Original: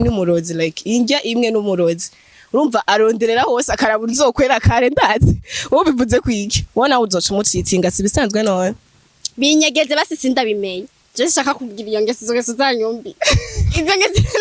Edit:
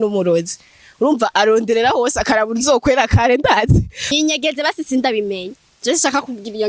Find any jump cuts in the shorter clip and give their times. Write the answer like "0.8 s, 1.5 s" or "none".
4.0 s